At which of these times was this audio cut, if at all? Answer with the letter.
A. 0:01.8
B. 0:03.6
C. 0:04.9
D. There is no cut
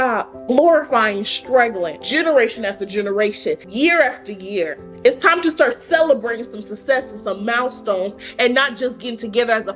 B